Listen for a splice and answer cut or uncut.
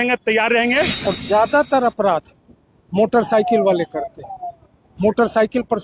cut